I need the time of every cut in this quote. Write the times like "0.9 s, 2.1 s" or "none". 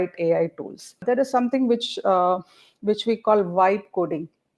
1.0 s